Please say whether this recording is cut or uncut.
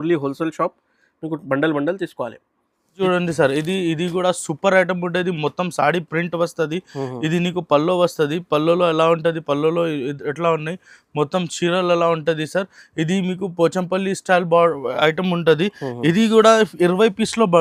uncut